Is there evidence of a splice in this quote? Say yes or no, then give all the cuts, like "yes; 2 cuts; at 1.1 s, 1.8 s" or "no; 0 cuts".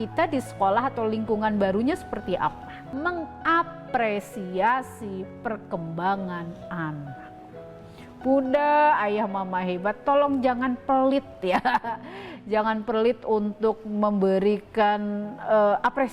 yes; 1 cut; at 2.9 s